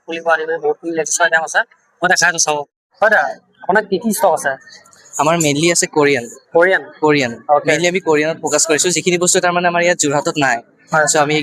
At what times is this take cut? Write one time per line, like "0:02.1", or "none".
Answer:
0:02.8